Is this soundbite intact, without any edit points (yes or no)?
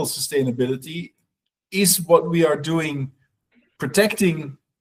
yes